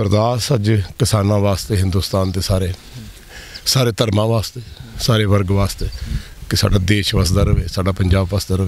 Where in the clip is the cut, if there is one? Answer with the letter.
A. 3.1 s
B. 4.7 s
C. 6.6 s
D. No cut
D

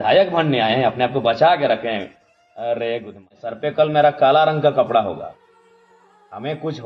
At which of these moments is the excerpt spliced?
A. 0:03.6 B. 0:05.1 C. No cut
A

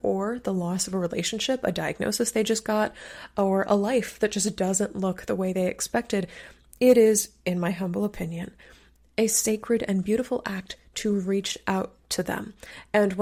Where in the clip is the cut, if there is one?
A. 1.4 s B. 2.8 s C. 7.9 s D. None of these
D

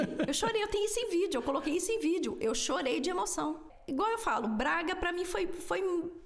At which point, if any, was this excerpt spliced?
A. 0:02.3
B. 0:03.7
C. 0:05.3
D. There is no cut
B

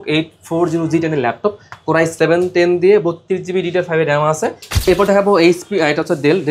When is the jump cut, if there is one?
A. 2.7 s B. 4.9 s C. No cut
B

